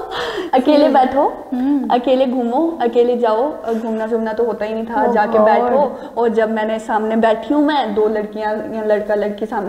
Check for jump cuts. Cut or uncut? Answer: uncut